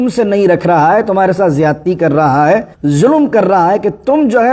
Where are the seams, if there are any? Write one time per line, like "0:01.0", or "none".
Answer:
0:02.7